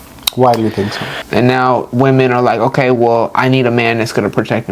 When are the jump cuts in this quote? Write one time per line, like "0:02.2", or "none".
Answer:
0:01.1

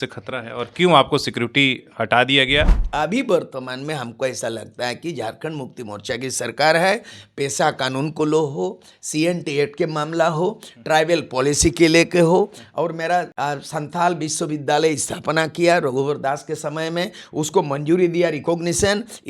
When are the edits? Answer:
0:02.8
0:13.3

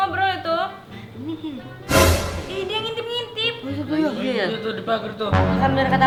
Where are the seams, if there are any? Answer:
none

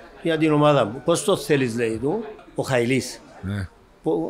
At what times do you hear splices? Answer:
0:02.4

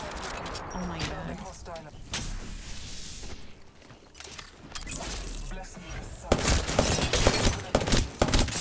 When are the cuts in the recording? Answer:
0:02.0

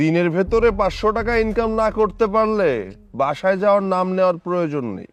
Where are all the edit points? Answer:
none

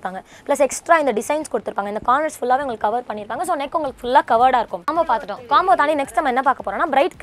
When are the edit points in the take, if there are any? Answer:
0:04.8

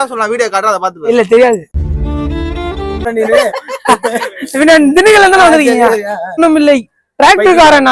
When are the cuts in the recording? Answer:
0:03.0
0:06.4

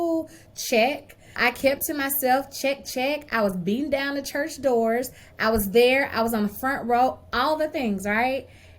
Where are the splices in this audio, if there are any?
0:01.4

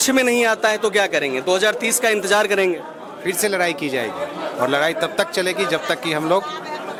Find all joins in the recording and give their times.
none

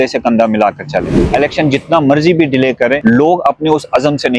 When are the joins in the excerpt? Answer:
0:01.2
0:03.0

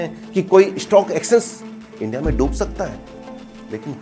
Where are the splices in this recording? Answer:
none

